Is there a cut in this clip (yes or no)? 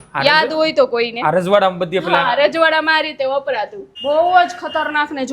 yes